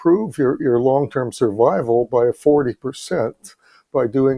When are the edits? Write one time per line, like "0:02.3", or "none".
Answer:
none